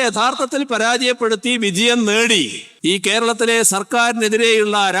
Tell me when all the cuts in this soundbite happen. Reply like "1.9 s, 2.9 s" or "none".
2.6 s